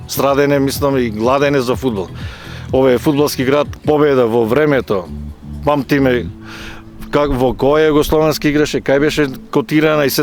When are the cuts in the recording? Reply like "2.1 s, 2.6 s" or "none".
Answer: 3.7 s